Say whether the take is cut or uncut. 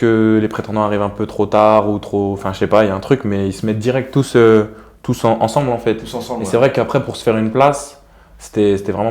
uncut